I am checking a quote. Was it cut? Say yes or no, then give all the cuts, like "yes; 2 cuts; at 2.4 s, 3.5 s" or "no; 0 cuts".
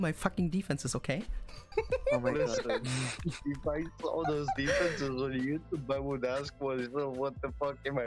no; 0 cuts